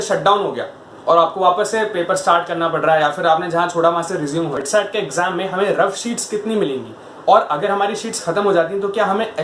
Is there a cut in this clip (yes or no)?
yes